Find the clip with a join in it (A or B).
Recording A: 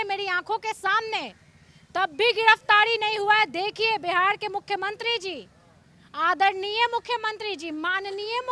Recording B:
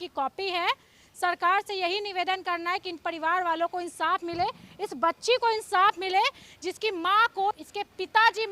B